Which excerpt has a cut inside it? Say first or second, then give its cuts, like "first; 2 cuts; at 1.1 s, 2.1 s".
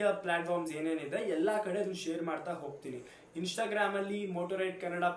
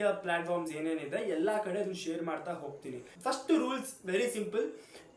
second; 1 cut; at 3.1 s